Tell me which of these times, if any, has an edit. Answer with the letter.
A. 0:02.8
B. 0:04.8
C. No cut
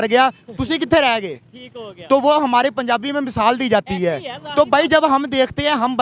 C